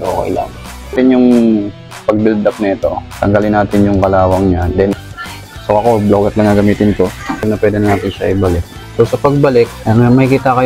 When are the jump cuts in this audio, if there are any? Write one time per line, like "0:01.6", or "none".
0:00.9
0:04.9
0:07.5

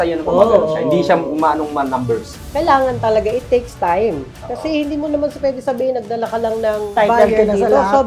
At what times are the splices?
0:02.4
0:06.9

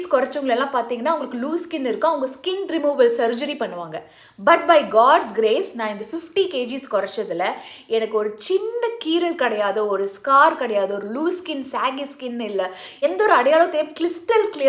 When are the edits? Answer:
none

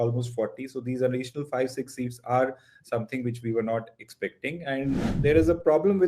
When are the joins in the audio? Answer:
0:05.1

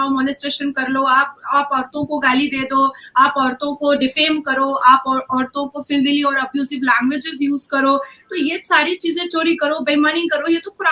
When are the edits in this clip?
none

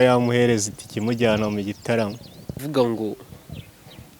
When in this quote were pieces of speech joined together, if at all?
0:02.6

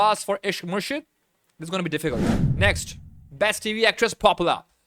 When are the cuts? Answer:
0:02.4

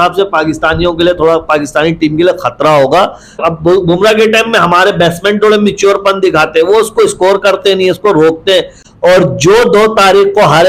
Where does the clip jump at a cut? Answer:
0:03.4
0:08.8

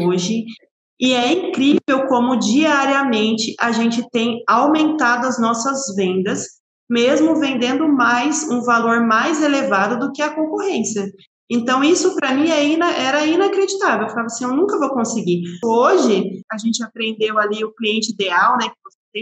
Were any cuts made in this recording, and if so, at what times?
0:15.6
0:16.4

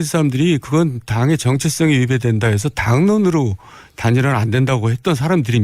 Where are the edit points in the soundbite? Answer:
0:01.9

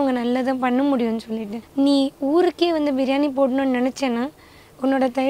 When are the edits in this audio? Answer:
0:01.6

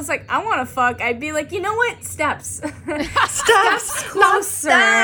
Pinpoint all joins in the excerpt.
none

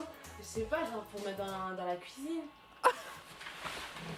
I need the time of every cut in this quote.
none

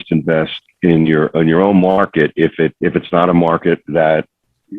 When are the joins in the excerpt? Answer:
0:02.7

